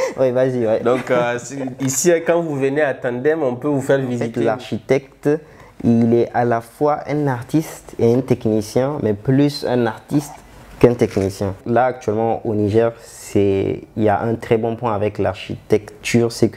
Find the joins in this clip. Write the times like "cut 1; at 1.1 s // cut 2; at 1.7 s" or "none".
cut 1; at 4.3 s // cut 2; at 11.6 s